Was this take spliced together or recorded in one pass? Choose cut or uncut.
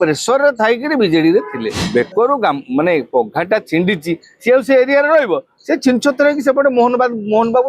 cut